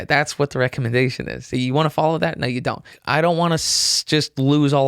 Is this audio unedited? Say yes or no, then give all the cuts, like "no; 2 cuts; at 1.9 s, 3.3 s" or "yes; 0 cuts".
no; 1 cut; at 2.9 s